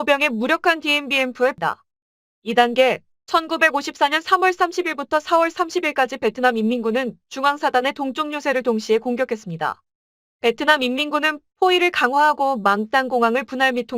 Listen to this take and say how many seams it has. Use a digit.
1